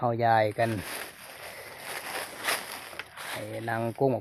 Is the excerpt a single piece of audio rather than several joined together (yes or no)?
yes